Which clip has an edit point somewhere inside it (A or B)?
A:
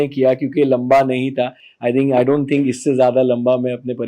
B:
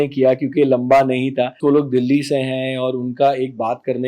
B